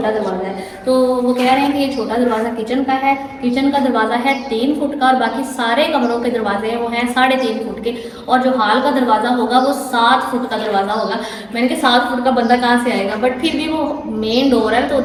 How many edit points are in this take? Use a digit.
0